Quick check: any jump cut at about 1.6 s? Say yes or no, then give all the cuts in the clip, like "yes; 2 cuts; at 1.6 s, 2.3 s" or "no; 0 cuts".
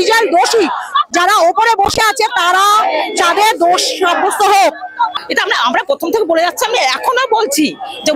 no; 1 cut; at 5.2 s